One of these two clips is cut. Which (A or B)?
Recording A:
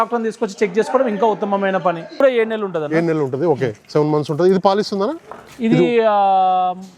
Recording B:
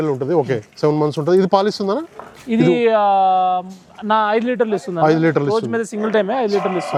A